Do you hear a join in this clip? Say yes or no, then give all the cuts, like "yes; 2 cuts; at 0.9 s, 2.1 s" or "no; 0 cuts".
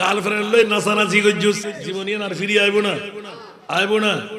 yes; 1 cut; at 1.8 s